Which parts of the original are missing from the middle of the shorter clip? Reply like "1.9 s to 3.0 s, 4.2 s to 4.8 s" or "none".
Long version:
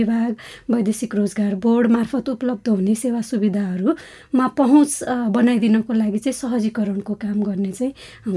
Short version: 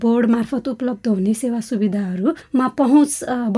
4.0 s to 4.2 s